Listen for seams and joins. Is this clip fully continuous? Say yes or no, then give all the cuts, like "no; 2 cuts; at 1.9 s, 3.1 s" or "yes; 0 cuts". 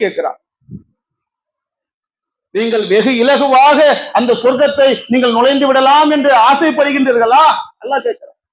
yes; 0 cuts